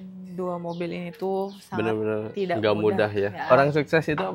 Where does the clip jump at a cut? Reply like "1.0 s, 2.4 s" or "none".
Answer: 3.4 s